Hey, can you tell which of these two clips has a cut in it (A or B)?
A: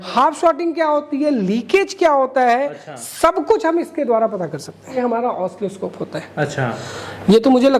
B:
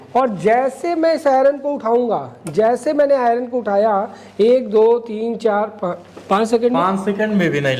A